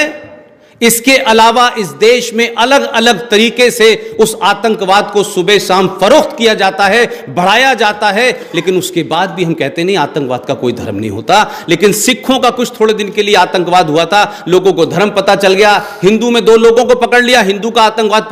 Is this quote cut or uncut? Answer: uncut